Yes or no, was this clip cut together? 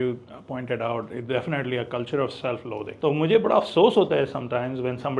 yes